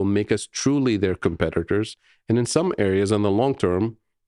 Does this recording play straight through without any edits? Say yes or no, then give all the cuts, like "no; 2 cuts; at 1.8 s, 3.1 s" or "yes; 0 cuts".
yes; 0 cuts